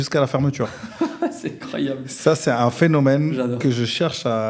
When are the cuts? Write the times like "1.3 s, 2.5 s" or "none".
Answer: none